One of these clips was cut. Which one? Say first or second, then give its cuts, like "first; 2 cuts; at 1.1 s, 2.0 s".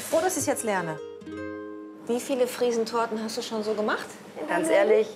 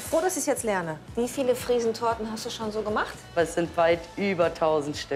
second; 2 cuts; at 1.0 s, 3.3 s